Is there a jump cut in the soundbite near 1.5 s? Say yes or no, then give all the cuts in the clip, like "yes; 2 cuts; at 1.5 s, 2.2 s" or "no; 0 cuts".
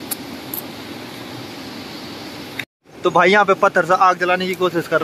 no; 1 cut; at 2.9 s